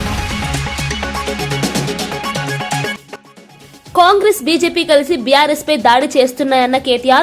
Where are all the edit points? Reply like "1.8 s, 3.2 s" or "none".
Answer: 2.9 s